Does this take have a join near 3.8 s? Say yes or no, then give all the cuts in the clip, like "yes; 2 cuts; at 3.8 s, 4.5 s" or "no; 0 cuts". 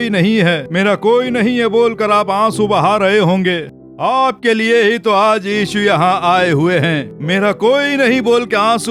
yes; 1 cut; at 3.8 s